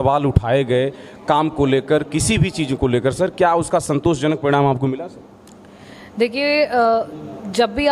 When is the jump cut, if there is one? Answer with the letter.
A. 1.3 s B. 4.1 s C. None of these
C